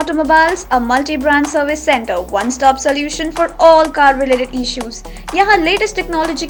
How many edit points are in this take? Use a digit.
0